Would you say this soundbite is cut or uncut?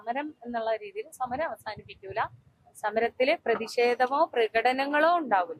uncut